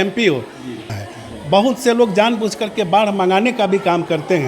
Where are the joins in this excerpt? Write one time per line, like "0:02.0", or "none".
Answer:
0:00.9